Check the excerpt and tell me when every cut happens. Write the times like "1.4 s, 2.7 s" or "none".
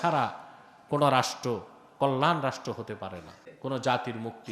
3.5 s